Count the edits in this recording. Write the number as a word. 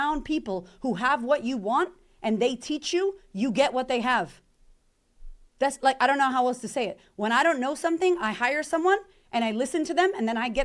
zero